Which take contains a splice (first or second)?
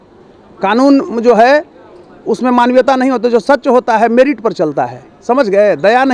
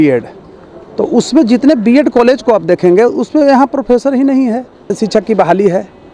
second